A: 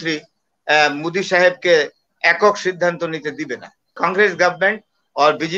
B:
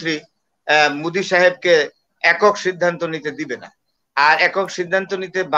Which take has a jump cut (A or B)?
A